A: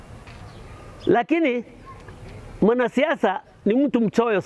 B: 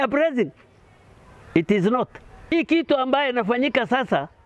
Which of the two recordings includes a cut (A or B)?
B